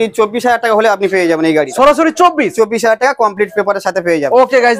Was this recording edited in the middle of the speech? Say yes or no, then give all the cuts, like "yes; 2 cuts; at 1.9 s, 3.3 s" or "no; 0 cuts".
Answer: no; 0 cuts